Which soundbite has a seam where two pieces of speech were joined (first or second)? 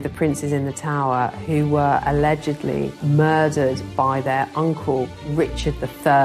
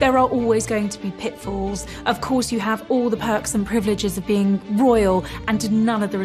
first